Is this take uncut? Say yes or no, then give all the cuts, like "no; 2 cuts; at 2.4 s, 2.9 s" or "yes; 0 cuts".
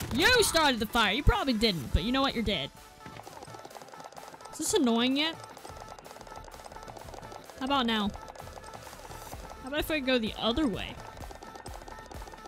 no; 1 cut; at 3.1 s